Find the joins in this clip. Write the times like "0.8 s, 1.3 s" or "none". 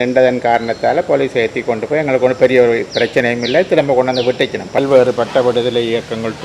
4.8 s